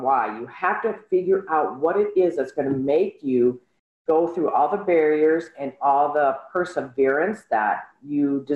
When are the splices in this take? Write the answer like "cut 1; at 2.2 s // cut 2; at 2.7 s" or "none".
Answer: none